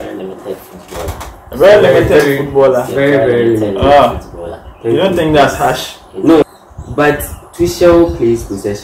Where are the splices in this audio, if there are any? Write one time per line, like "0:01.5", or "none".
0:06.4

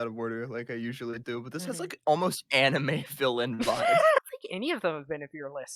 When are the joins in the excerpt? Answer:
0:04.2

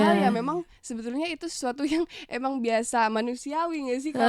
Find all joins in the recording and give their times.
none

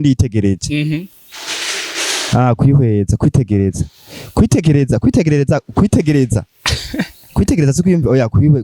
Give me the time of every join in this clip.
none

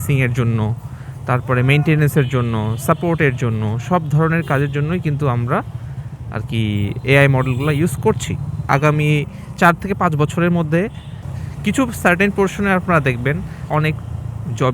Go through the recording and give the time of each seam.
0:08.7

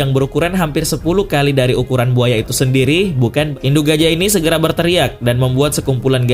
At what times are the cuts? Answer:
0:03.5

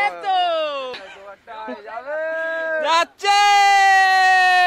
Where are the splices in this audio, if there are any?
0:01.1

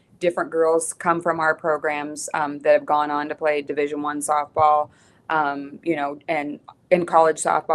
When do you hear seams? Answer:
none

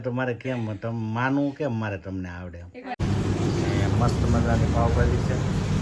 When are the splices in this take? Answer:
0:03.0

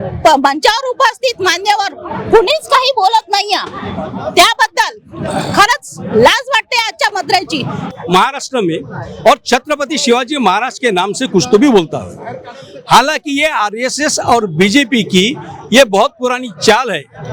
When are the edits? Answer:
0:07.9

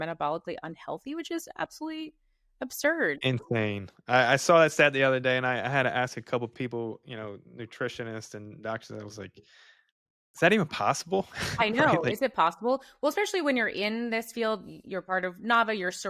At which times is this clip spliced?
none

